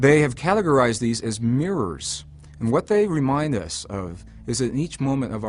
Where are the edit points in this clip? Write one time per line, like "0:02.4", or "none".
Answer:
0:01.6